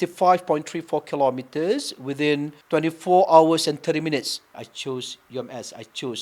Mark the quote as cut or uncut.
cut